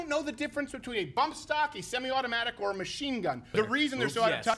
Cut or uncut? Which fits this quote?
cut